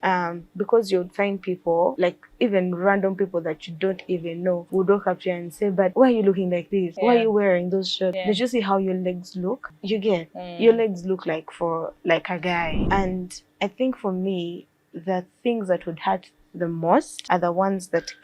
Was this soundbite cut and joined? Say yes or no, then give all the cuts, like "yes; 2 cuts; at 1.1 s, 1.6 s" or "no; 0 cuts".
yes; 8 cuts; at 2.0 s, 4.6 s, 5.9 s, 6.9 s, 8.2 s, 9.7 s, 12.8 s, 17.2 s